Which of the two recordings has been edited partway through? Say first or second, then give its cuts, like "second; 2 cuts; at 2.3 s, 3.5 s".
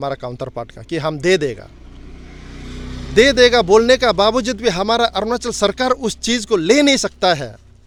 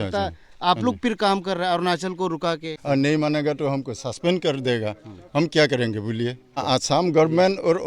second; 2 cuts; at 2.7 s, 6.6 s